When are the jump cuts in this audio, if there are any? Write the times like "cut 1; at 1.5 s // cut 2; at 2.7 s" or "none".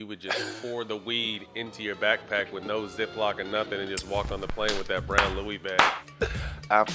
cut 1; at 6.0 s